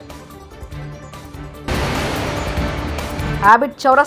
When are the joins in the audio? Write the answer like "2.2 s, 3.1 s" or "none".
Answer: 1.7 s, 3.3 s